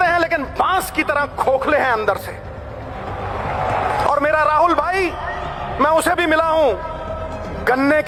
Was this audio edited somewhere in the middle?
no; 0 cuts

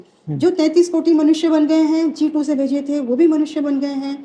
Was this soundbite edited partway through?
no; 0 cuts

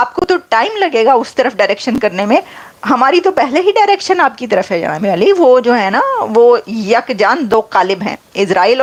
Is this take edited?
no; 0 cuts

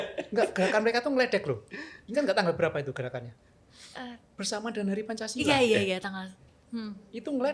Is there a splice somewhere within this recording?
yes; 1 cut; at 4.4 s

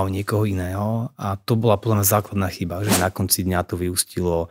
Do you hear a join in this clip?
yes; 1 cut; at 3.0 s

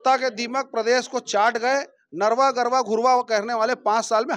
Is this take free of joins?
yes; 0 cuts

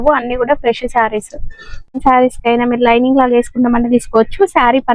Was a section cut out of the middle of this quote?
yes; 1 cut; at 2.0 s

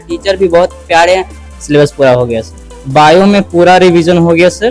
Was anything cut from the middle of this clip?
yes; 2 cuts; at 1.4 s, 2.6 s

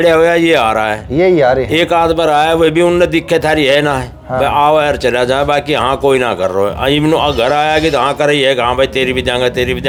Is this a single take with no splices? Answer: yes; 0 cuts

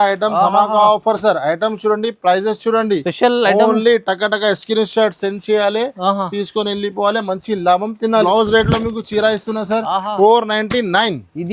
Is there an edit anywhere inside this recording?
yes; 1 cut; at 8.2 s

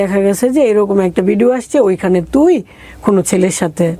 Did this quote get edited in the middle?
no; 0 cuts

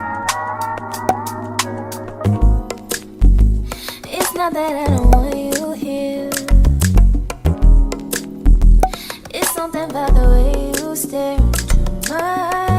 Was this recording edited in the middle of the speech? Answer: no; 0 cuts

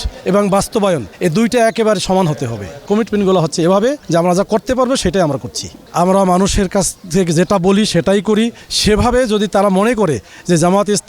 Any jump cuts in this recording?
yes; 4 cuts; at 1.1 s, 2.9 s, 4.0 s, 5.8 s

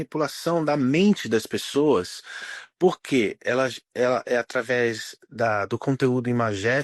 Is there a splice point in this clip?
no; 0 cuts

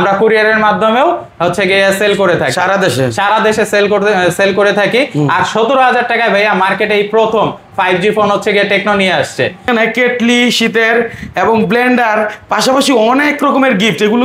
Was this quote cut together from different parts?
yes; 1 cut; at 9.7 s

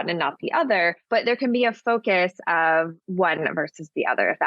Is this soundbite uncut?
no; 2 cuts; at 1.1 s, 3.0 s

